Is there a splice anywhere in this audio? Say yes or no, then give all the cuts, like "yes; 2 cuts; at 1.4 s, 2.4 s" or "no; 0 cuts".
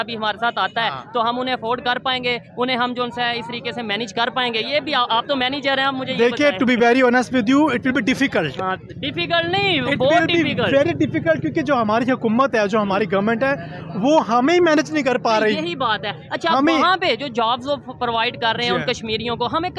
no; 0 cuts